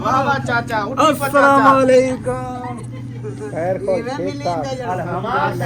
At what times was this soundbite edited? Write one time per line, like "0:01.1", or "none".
none